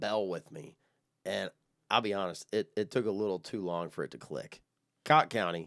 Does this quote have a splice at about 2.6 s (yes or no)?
no